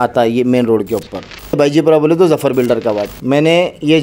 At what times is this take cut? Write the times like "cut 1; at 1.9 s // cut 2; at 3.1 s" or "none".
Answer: cut 1; at 1.6 s // cut 2; at 3.1 s